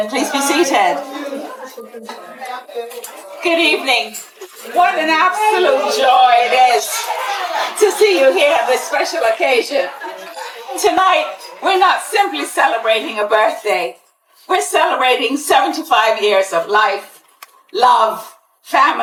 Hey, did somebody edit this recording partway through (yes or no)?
no